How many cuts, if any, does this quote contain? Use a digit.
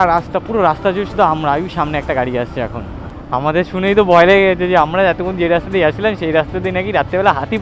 1